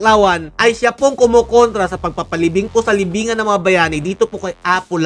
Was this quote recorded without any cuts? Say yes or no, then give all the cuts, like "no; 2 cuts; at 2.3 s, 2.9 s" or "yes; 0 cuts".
yes; 0 cuts